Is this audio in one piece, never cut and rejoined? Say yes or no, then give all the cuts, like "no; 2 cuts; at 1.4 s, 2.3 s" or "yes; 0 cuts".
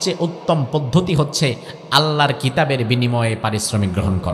yes; 0 cuts